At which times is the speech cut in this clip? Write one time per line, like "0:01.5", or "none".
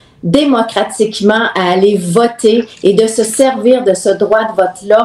none

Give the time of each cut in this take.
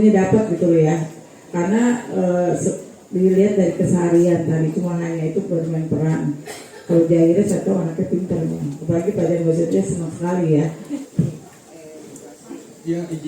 0:10.9

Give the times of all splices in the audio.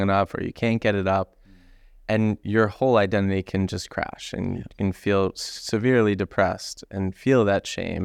none

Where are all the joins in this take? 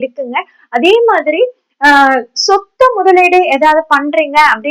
none

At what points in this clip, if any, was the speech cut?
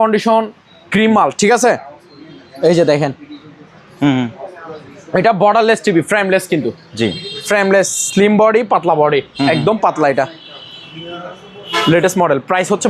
none

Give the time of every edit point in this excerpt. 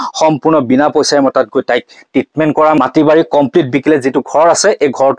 0:02.8

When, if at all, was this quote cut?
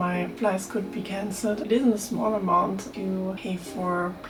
none

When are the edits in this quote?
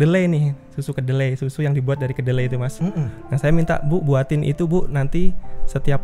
none

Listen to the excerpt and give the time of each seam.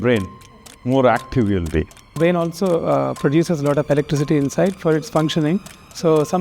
0:02.2

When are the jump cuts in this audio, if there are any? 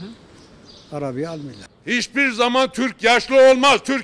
0:01.7

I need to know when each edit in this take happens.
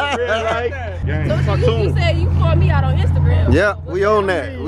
0:01.0

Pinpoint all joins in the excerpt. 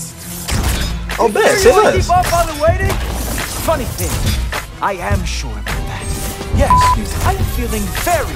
none

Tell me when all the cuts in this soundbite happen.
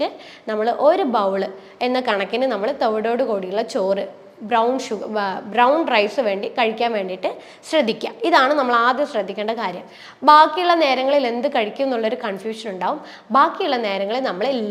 none

